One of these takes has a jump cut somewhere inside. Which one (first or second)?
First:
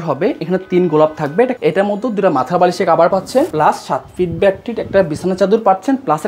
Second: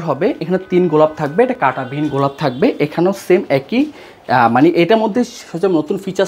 first